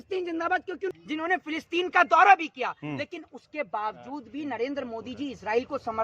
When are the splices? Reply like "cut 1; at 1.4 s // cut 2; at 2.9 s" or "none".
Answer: cut 1; at 0.9 s